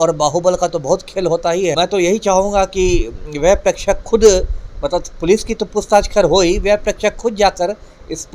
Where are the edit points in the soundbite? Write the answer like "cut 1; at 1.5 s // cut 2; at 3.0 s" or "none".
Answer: cut 1; at 1.7 s